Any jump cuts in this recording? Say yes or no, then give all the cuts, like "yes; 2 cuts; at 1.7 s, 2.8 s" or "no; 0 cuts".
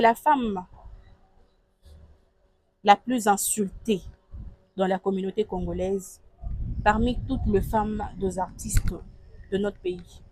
no; 0 cuts